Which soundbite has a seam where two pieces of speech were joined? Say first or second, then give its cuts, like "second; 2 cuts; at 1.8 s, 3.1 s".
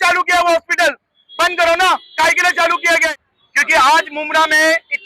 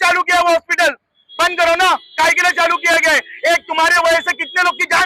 first; 1 cut; at 3.0 s